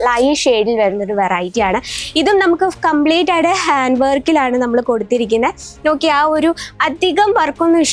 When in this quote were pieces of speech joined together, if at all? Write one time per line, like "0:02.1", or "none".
none